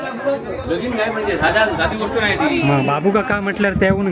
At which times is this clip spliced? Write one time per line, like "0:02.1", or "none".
none